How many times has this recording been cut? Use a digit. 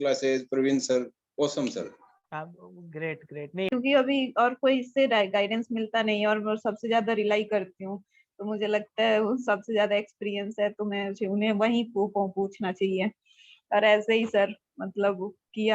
1